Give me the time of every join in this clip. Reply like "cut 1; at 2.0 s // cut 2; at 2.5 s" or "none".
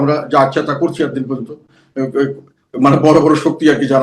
none